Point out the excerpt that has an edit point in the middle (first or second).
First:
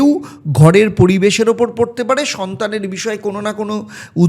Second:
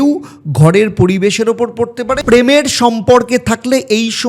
second